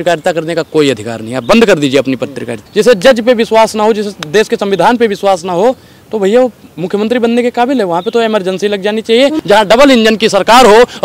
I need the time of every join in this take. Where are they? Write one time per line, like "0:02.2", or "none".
0:02.6
0:09.4

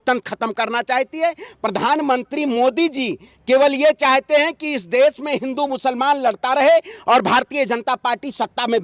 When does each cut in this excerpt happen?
none

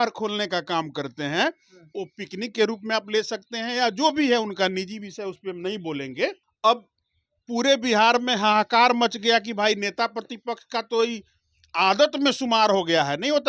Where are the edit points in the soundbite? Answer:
none

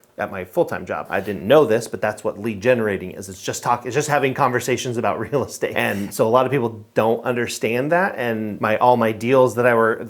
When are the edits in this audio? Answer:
0:01.1
0:05.7
0:08.5

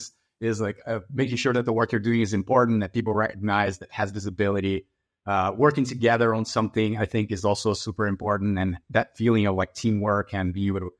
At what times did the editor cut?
none

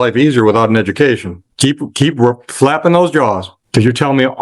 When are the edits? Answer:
0:01.4

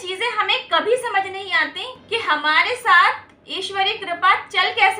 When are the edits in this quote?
0:01.9

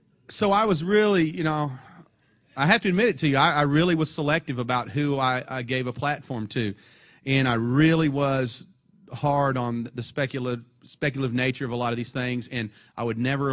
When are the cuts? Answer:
0:03.4

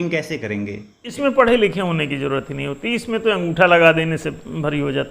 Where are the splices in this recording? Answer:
0:01.1

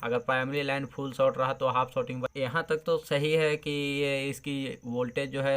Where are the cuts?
0:02.3

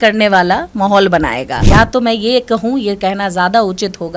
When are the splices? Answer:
0:01.6

